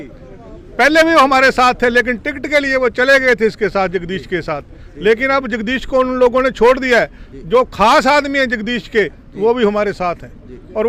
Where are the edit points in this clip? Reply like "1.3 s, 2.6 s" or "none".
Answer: none

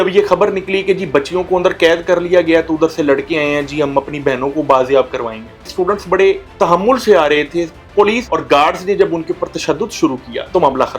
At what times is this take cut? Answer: 5.6 s

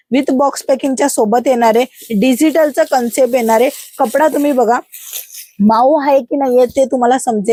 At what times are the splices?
none

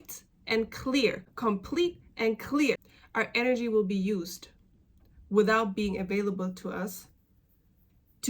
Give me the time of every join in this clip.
1.3 s

